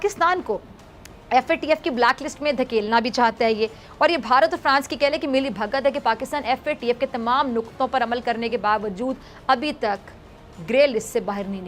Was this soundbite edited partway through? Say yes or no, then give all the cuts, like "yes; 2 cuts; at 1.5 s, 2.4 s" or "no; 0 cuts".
no; 0 cuts